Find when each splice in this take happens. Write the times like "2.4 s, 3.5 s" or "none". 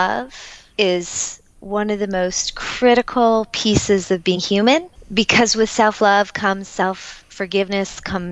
5.0 s

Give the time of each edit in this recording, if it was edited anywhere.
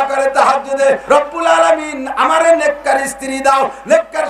1.0 s

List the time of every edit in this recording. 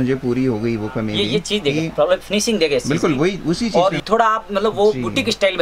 4.0 s

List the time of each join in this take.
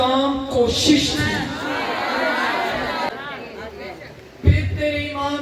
3.1 s

